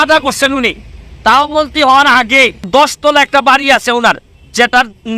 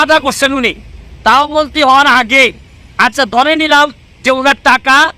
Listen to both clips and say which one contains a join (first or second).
first